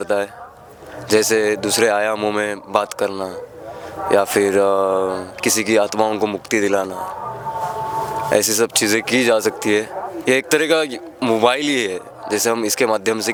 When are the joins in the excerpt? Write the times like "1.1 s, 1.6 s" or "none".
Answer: none